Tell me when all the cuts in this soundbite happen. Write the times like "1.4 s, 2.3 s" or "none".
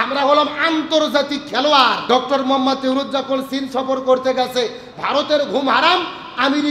2.0 s